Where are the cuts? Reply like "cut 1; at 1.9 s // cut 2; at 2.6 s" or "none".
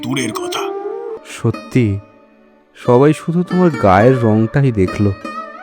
cut 1; at 1.1 s